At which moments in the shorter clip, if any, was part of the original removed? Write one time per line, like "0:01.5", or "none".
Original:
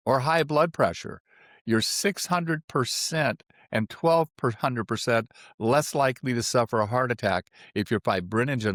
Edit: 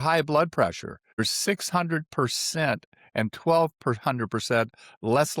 0:01.2